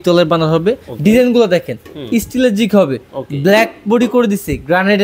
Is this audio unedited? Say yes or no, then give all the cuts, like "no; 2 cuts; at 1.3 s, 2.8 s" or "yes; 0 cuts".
yes; 0 cuts